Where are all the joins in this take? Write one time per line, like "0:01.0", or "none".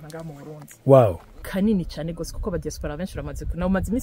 0:01.3